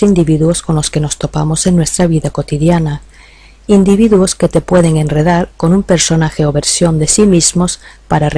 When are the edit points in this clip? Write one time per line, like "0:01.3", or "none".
none

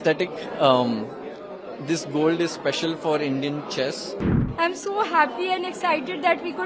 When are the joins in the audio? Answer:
0:04.2

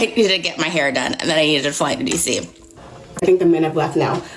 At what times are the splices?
0:02.9

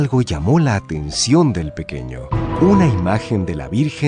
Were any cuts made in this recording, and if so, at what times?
0:02.6

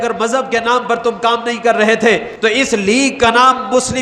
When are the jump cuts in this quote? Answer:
0:02.3

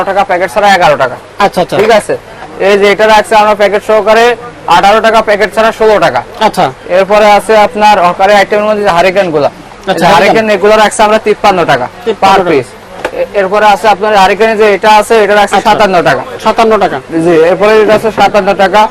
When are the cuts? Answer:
none

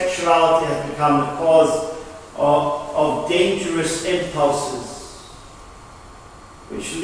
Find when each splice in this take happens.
0:02.5

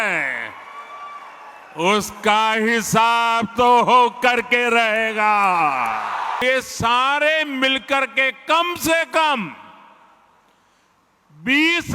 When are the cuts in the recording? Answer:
0:06.4

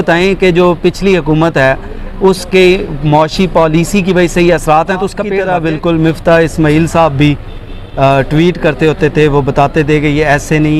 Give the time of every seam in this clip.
0:05.3

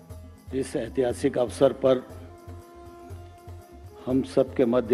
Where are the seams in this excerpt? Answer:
0:02.1
0:04.0

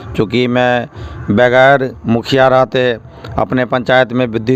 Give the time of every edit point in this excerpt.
none

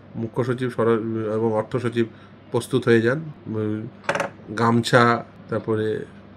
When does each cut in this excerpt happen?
0:03.4
0:05.3

